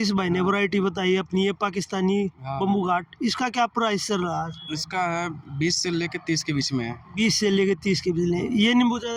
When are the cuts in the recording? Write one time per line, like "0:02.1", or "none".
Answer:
none